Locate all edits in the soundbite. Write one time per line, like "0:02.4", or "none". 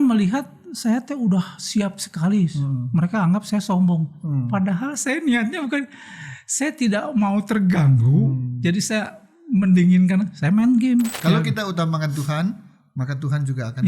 0:11.2

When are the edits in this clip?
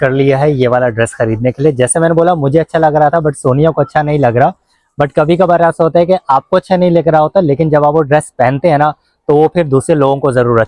none

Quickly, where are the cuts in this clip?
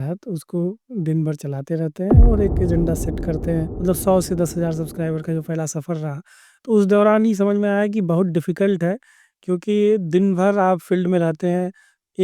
0:03.7

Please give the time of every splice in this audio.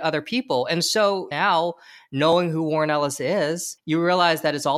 0:01.3
0:03.7

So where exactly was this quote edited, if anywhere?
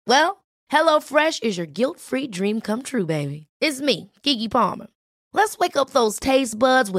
none

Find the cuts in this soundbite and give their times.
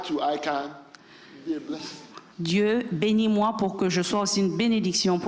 none

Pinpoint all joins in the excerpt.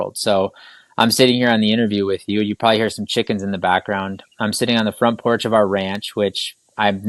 none

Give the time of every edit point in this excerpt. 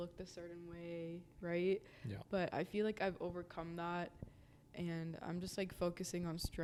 none

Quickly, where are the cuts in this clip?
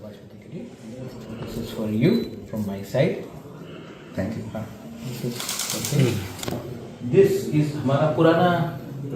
0:06.3

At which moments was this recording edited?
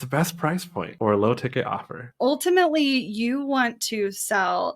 0:00.9
0:02.1

